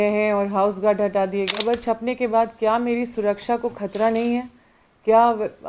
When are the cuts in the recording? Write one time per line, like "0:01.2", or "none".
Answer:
0:01.5